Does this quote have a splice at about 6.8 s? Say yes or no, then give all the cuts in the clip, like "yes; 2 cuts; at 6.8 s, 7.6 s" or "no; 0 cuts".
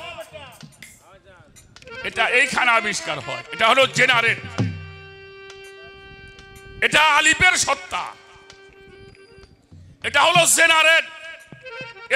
no; 0 cuts